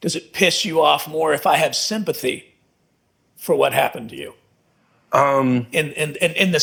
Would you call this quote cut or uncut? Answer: uncut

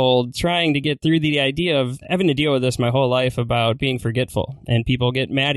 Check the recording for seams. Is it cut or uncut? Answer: cut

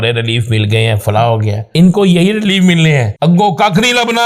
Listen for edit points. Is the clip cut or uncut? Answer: cut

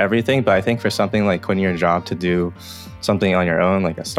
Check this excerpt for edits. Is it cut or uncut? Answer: uncut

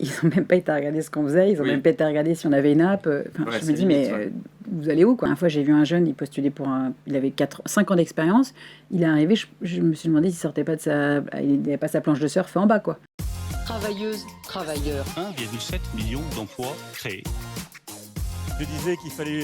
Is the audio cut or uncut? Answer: cut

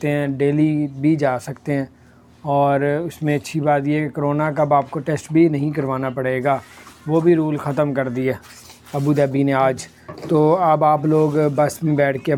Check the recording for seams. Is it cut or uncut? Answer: uncut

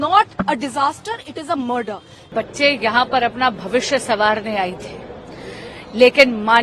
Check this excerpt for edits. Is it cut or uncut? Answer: cut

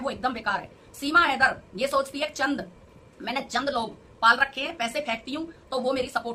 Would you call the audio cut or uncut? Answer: uncut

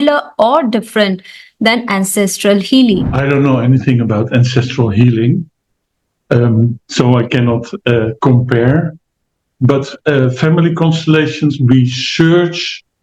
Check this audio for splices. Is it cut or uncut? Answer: cut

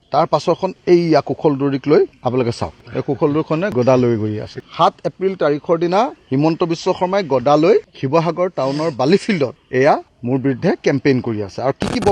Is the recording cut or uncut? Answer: cut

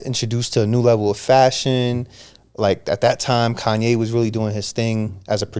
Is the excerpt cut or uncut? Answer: uncut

